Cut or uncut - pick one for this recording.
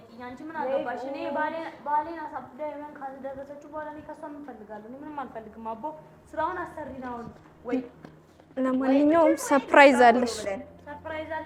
uncut